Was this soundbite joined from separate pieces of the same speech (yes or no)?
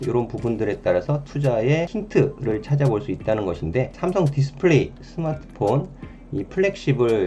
yes